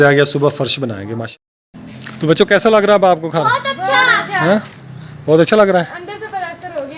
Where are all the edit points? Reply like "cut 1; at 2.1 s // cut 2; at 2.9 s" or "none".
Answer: cut 1; at 1.3 s